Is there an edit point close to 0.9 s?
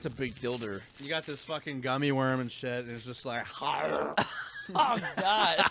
yes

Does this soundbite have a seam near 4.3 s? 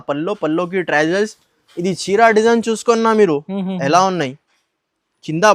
no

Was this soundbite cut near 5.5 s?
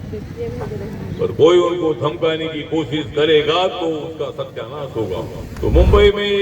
yes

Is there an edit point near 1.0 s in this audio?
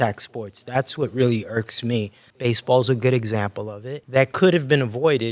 no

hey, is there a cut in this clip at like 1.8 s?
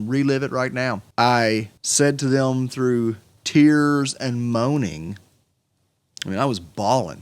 yes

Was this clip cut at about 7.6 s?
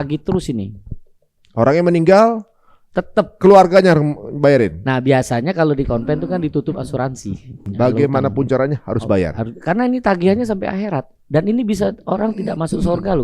yes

